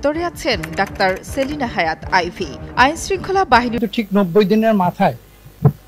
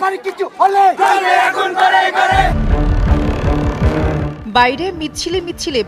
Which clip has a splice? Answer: first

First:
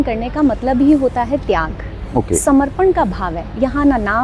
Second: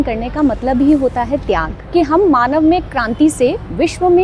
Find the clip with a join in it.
second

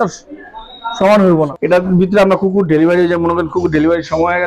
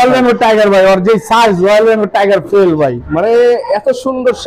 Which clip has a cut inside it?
first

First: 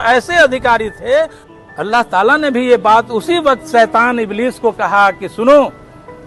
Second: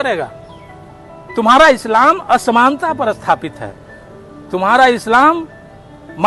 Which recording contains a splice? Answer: first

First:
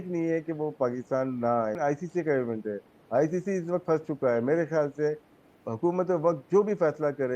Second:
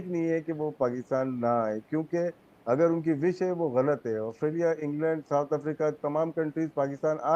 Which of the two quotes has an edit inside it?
first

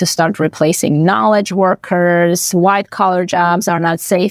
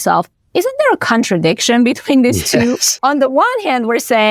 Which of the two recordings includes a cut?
second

